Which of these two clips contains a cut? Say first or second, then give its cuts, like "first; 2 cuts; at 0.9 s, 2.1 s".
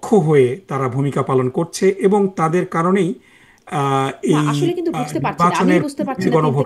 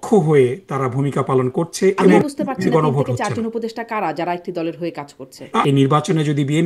second; 2 cuts; at 2.1 s, 5.6 s